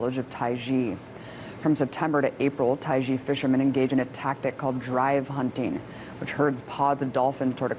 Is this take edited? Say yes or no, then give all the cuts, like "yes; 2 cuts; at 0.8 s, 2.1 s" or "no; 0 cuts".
yes; 1 cut; at 2.7 s